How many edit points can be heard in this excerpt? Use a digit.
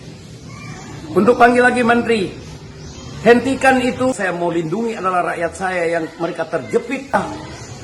2